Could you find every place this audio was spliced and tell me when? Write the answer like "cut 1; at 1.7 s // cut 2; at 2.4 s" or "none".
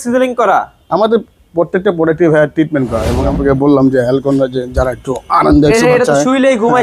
cut 1; at 3.2 s